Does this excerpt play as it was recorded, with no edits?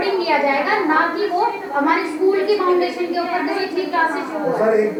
yes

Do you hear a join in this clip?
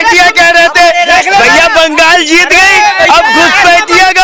no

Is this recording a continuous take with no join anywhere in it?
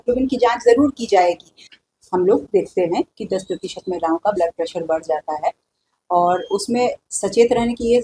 no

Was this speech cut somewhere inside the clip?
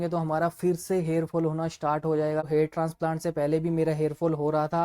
yes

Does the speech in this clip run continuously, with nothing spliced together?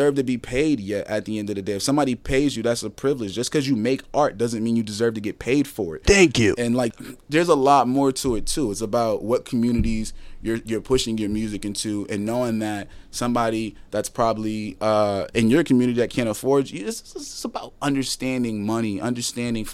no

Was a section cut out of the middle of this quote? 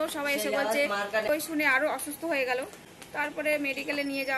yes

